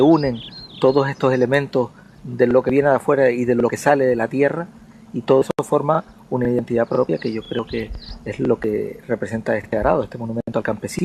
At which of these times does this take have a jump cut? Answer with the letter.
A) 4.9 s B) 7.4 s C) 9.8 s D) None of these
B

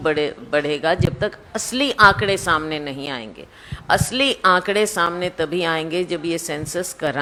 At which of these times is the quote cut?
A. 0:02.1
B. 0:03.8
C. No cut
C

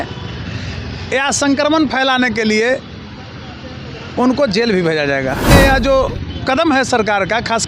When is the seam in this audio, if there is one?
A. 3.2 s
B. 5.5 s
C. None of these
B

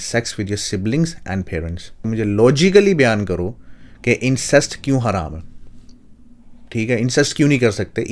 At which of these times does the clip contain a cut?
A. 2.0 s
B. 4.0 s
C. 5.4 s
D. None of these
A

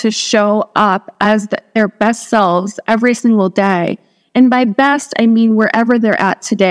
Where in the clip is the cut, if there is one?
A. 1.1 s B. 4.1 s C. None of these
A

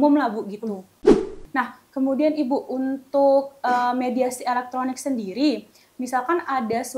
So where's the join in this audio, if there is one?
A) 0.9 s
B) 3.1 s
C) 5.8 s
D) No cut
A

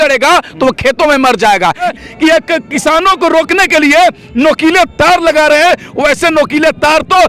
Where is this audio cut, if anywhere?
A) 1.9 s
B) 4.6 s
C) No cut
A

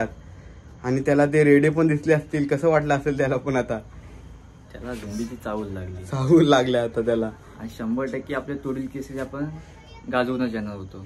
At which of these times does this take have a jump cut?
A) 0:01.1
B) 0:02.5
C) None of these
C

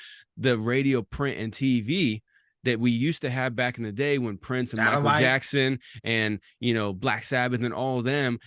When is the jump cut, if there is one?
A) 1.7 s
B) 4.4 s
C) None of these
C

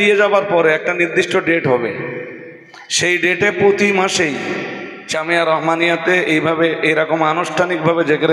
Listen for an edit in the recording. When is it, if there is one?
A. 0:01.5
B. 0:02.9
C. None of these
C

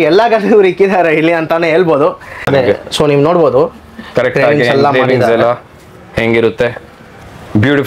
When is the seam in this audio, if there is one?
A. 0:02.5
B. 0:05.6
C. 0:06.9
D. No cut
A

